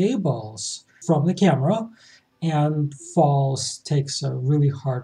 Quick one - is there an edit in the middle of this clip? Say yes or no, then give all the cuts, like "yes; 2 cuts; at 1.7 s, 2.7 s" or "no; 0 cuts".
yes; 1 cut; at 0.9 s